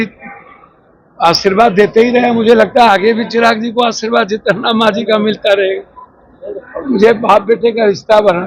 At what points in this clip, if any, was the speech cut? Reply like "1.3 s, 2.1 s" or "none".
none